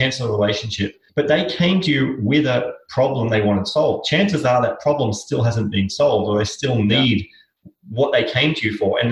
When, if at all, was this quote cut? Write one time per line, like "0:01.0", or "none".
0:01.0